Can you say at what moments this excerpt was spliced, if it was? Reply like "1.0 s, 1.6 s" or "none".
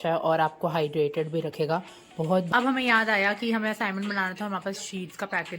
2.5 s